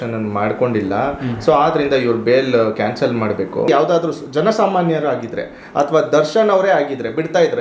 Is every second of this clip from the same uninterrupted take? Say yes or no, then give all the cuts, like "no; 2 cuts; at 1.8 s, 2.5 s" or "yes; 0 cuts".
no; 1 cut; at 3.7 s